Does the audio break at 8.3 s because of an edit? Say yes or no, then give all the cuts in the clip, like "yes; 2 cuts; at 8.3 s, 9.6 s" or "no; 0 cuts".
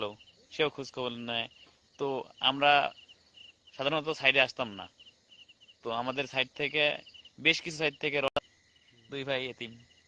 yes; 1 cut; at 8.3 s